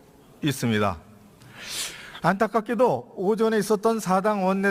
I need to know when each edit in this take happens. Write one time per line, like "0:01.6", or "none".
0:01.1